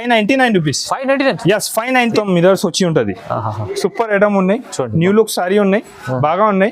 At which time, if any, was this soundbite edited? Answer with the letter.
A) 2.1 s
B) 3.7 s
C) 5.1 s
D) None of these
A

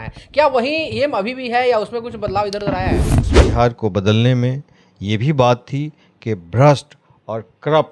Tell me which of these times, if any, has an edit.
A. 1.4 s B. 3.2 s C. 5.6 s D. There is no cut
B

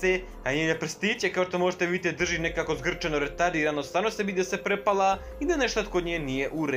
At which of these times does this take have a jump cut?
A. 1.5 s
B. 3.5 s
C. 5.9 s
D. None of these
D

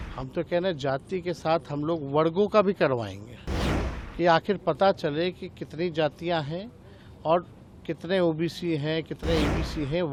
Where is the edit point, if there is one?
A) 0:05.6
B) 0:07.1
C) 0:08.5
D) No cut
D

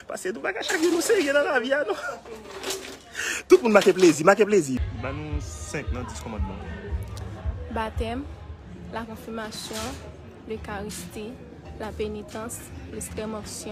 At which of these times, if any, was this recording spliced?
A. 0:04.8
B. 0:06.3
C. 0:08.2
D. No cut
A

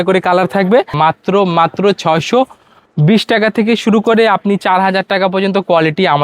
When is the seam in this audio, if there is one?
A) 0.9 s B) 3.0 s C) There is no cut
A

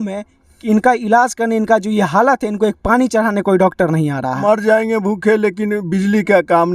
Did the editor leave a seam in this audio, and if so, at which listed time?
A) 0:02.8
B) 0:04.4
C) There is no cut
B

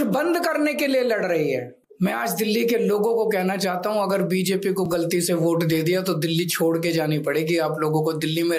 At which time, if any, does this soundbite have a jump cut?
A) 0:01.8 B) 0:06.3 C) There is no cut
A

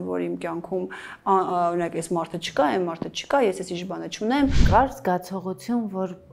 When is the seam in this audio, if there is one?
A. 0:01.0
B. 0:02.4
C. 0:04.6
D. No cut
C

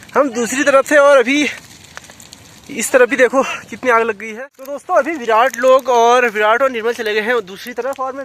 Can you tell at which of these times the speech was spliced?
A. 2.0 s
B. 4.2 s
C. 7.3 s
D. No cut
B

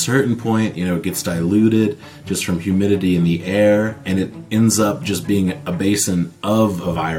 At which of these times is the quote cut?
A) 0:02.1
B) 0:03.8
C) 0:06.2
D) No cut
D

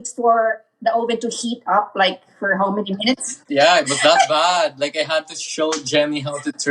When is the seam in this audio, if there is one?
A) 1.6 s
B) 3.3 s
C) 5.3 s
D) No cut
B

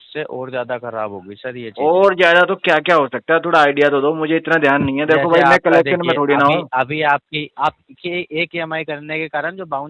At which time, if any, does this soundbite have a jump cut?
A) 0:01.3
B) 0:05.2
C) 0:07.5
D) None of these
C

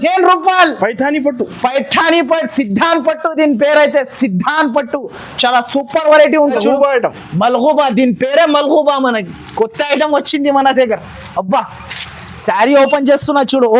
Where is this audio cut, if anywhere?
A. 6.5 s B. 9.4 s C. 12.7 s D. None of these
A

